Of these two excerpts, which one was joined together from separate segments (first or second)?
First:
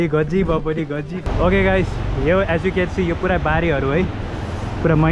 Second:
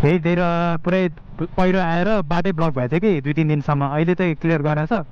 first